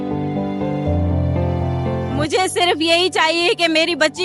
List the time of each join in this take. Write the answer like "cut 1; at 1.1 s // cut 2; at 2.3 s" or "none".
cut 1; at 2.1 s